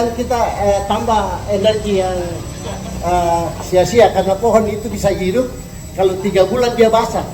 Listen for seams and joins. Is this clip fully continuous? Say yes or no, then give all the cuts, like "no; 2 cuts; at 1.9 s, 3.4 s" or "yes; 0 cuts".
yes; 0 cuts